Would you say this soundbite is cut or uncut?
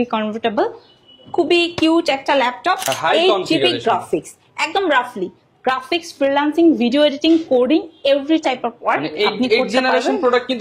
cut